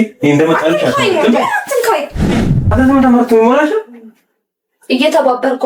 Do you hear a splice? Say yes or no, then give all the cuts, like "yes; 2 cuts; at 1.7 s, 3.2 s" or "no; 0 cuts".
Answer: yes; 1 cut; at 2.6 s